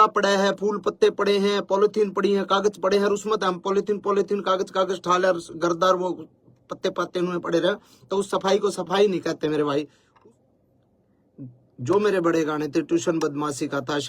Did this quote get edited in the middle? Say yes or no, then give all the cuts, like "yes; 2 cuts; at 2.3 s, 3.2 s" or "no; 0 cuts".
yes; 1 cut; at 10.0 s